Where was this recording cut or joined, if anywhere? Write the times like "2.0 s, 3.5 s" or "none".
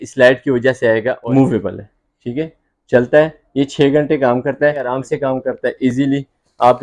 1.2 s, 4.9 s